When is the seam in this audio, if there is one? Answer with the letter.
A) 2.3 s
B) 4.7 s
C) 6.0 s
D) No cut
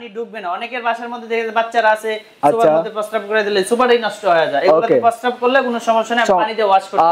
D